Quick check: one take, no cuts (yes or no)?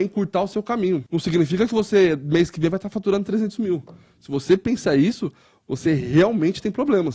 no